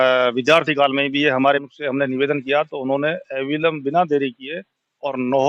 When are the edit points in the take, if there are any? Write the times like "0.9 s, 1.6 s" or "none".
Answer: 1.6 s